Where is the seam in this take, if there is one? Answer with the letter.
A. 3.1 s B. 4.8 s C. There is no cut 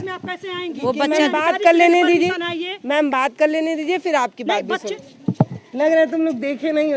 B